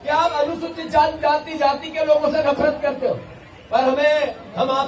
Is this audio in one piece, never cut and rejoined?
yes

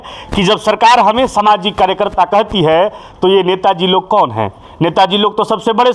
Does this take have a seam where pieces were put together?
no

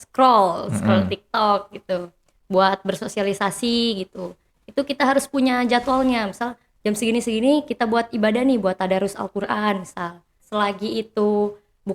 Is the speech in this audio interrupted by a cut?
yes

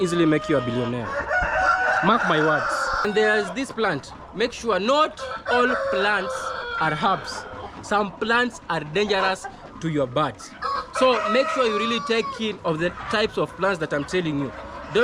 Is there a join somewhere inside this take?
yes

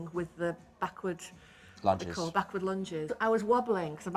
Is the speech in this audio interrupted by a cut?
yes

